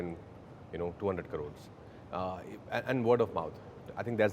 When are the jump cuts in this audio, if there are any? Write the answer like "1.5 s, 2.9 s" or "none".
none